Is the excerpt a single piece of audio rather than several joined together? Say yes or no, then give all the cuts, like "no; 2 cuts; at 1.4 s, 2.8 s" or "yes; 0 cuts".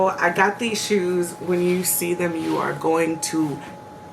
yes; 0 cuts